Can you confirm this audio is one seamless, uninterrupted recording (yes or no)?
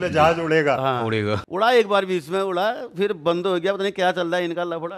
no